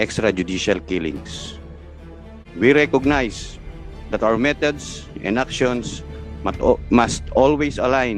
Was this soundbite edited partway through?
yes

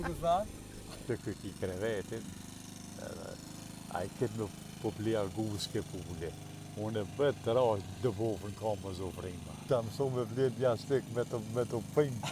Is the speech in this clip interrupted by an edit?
yes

